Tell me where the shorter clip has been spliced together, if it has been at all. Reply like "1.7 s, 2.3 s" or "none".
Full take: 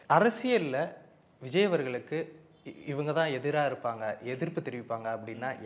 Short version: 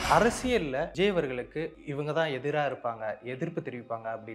0.9 s, 1.8 s